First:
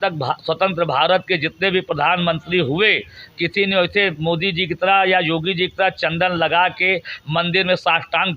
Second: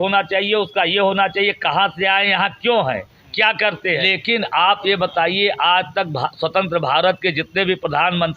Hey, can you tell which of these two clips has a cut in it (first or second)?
second